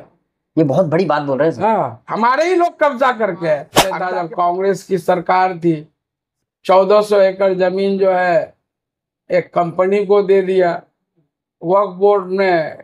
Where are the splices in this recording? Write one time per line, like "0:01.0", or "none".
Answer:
0:03.9